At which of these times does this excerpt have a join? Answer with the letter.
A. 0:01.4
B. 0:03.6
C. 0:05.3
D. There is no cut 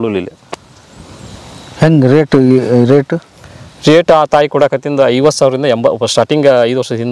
A